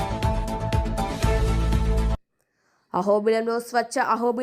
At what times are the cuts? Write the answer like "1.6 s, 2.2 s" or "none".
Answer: 2.3 s